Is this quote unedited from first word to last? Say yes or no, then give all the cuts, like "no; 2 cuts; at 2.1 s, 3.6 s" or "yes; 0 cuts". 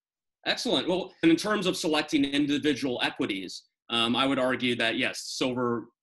no; 1 cut; at 1.2 s